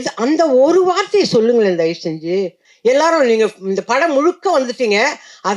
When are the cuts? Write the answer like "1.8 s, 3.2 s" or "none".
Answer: 2.6 s